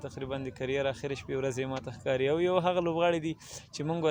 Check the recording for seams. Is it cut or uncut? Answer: uncut